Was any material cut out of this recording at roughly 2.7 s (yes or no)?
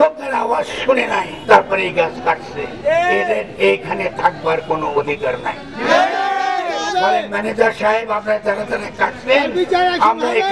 no